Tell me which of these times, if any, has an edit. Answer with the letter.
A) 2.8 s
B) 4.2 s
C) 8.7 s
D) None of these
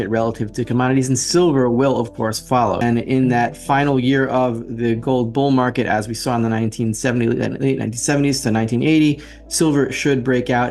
A